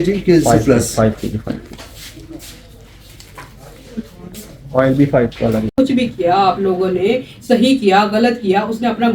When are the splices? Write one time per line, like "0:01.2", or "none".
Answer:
0:05.7